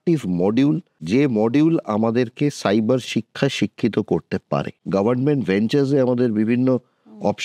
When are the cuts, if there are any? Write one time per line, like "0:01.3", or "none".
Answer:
0:00.9
0:04.8